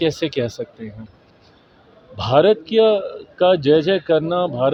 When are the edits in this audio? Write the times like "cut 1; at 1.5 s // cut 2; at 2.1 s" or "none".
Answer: none

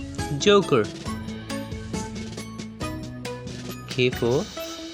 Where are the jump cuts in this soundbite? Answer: cut 1; at 0.9 s // cut 2; at 3.0 s // cut 3; at 3.9 s

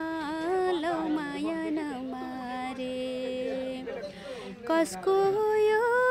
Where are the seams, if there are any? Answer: none

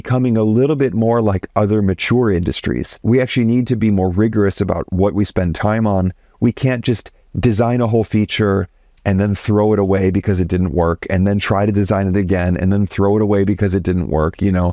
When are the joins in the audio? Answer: cut 1; at 2.9 s

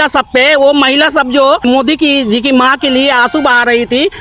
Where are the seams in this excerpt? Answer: cut 1; at 1.6 s

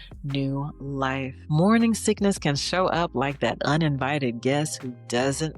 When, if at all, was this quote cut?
cut 1; at 1.4 s

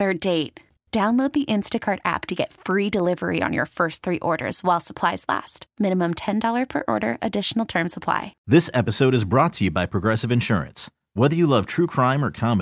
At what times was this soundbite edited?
cut 1; at 8.3 s

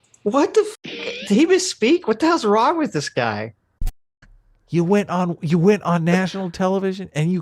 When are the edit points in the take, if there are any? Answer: cut 1; at 4.1 s

